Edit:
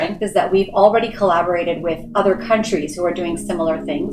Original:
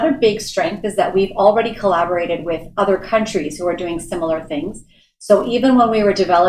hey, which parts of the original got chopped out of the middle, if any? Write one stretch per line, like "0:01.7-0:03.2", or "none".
none

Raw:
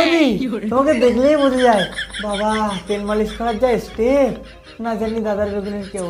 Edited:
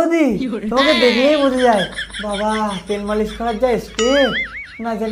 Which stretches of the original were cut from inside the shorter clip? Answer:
none

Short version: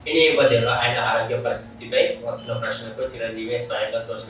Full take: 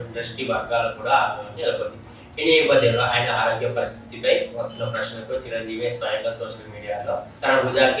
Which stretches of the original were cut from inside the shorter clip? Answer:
none

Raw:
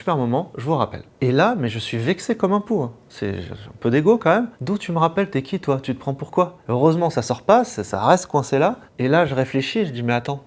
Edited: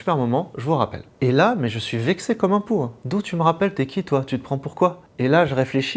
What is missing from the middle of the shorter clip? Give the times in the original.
0:03.0-0:04.6
0:06.6-0:08.8

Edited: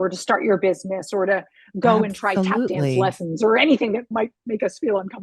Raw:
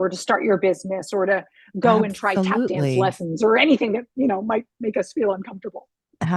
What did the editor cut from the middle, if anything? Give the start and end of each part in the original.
0:04.1-0:04.4

